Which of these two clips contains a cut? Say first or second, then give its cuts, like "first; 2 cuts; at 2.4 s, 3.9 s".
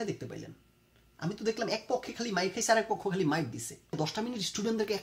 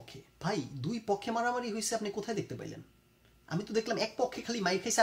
first; 1 cut; at 4.0 s